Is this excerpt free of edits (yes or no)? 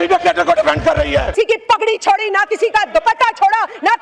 no